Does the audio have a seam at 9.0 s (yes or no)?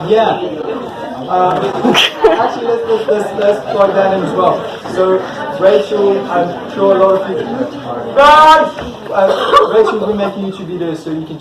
yes